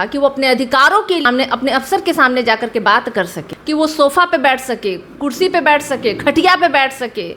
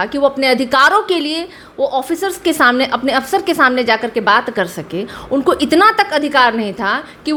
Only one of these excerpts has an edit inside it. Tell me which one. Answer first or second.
first